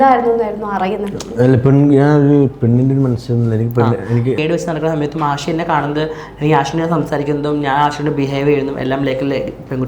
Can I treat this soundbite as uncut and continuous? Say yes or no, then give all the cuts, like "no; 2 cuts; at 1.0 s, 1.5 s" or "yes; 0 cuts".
no; 1 cut; at 4.4 s